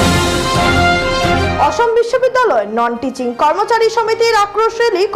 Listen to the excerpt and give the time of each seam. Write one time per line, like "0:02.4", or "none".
0:01.4